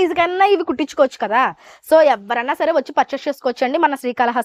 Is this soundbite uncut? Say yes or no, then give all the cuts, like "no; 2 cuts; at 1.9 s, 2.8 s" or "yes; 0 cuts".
yes; 0 cuts